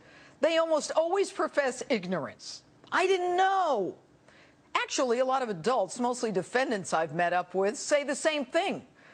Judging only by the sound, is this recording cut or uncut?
uncut